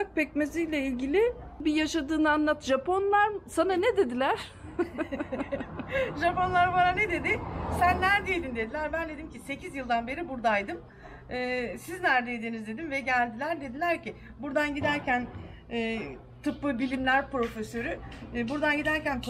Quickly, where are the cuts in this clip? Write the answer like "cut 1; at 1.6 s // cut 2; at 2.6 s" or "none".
cut 1; at 1.6 s